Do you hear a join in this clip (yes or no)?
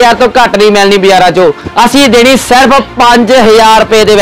no